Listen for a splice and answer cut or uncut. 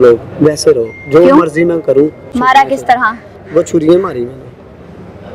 cut